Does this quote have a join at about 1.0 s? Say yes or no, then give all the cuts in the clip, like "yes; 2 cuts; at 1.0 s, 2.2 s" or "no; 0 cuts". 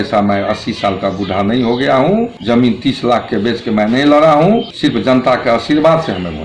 no; 2 cuts; at 2.4 s, 4.7 s